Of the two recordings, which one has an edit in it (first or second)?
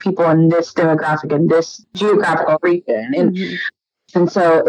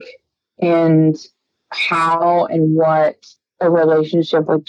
first